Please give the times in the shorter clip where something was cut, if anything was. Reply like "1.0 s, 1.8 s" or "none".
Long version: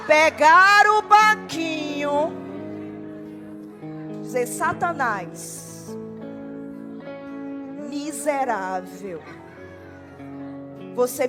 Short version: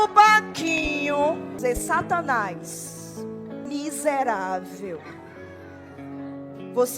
1.5 s, 3.7 s